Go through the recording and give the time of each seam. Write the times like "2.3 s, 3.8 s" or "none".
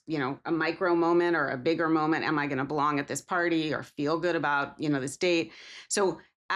none

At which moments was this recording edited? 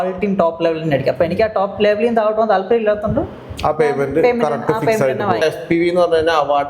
5.4 s

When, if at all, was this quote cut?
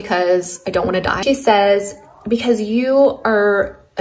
1.2 s

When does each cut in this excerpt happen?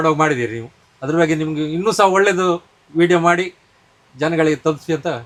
none

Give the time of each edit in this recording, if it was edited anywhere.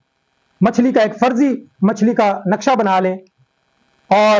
none

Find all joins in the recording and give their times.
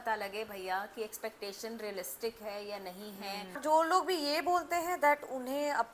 3.5 s

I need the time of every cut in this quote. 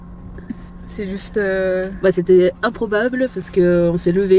none

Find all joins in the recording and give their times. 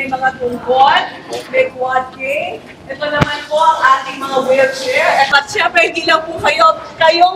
5.3 s

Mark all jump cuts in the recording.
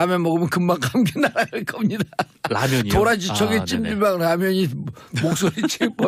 1.9 s

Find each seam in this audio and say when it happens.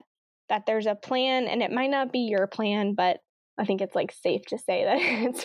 3.5 s

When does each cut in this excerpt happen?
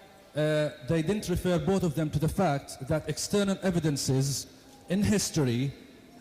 5.1 s

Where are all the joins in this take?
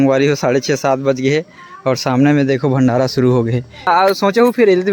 3.9 s

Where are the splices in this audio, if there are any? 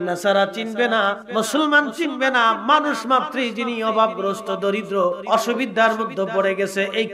1.2 s, 5.2 s

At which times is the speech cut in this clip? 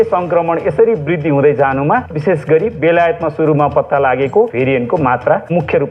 2.2 s, 4.5 s

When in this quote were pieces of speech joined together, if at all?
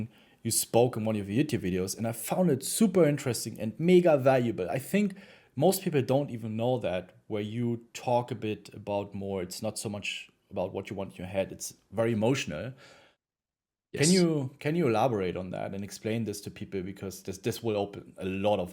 none

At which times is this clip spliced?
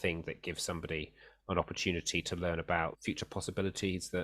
3.0 s

